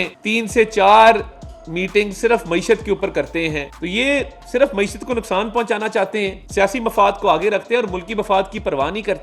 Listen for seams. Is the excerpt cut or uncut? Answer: cut